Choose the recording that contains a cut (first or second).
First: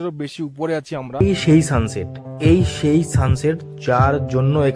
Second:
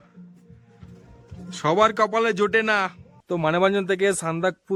first